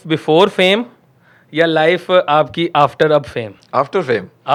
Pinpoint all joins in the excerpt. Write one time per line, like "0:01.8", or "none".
none